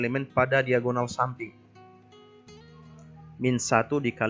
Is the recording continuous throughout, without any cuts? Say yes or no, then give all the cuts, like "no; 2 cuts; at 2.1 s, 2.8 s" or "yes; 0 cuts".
no; 2 cuts; at 1.5 s, 3.3 s